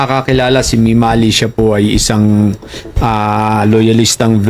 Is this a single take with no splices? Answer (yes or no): yes